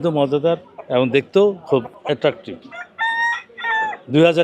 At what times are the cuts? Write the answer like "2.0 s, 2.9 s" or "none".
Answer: none